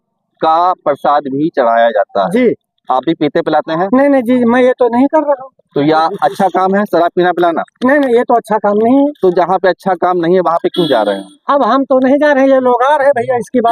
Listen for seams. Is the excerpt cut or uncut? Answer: uncut